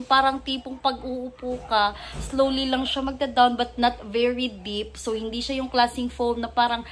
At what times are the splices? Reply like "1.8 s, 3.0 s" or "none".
none